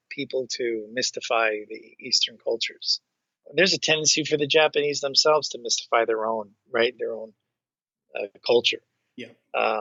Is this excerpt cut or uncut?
uncut